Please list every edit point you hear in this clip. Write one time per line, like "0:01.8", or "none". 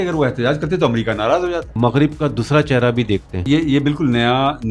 0:01.7
0:03.4